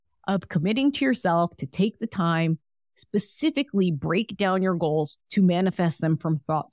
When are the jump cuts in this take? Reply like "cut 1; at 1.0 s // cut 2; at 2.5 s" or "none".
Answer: cut 1; at 5.2 s